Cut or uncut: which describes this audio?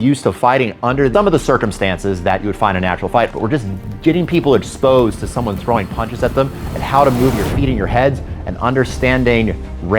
cut